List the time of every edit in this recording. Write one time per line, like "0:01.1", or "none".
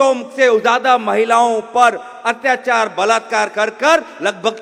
none